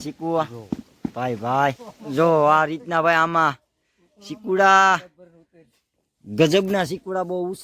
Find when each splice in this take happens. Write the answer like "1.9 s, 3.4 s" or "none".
1.9 s